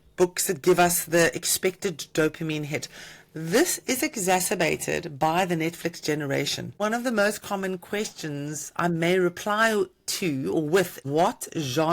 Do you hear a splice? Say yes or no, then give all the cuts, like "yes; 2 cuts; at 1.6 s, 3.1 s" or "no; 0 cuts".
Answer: yes; 2 cuts; at 6.8 s, 11.0 s